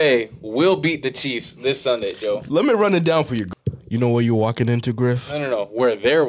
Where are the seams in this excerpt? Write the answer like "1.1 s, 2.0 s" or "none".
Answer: 3.5 s